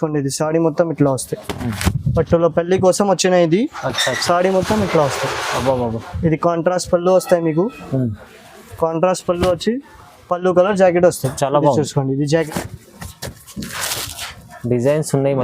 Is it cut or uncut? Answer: cut